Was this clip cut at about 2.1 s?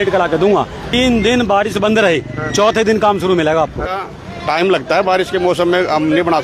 no; 2 cuts; at 0.9 s, 3.8 s

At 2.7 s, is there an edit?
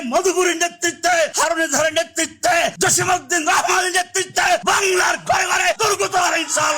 yes; 4 cuts; at 1.3 s, 2.7 s, 4.6 s, 5.8 s

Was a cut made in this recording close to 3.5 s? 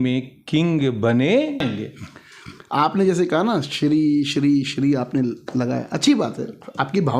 no; 1 cut; at 1.6 s

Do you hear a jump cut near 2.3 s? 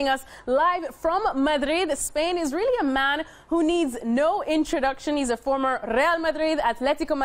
no; 1 cut; at 6.3 s

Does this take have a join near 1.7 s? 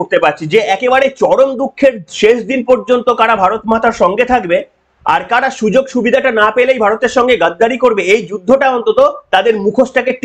no; 0 cuts

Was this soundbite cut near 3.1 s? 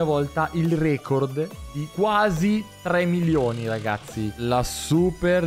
no; 1 cut; at 4.4 s

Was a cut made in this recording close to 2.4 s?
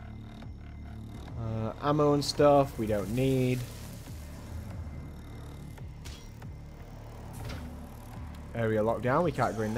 yes; 1 cut; at 2.4 s

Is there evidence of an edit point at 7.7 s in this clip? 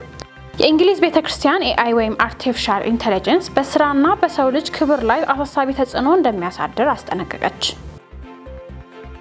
yes; 1 cut; at 7.7 s

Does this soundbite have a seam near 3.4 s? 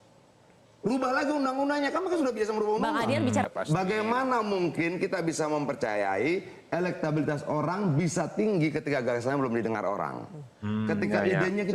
yes; 1 cut; at 3.4 s

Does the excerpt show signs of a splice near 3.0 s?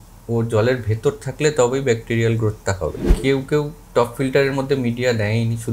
yes; 1 cut; at 3.0 s

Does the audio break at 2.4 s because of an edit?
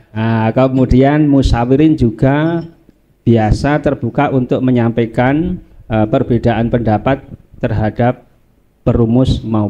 no; 0 cuts

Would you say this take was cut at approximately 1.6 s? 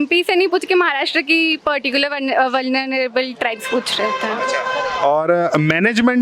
no; 0 cuts

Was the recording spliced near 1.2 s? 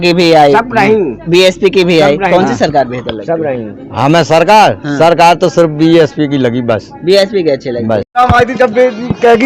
no; 1 cut; at 8.1 s

